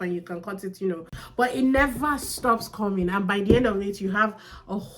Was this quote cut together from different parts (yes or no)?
yes